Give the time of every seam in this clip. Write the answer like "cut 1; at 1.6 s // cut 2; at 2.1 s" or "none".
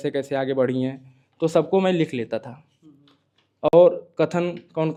none